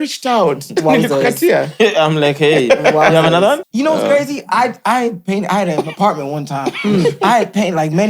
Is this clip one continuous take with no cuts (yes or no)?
no